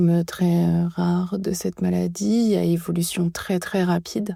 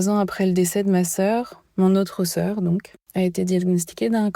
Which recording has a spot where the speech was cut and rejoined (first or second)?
second